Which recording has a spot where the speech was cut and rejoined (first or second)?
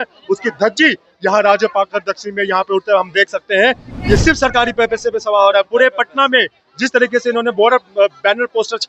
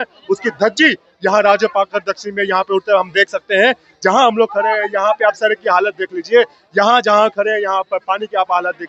first